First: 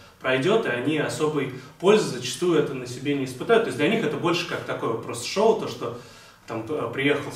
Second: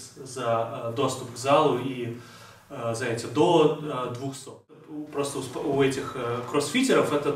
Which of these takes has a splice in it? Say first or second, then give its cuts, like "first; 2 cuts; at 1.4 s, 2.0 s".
second; 1 cut; at 4.8 s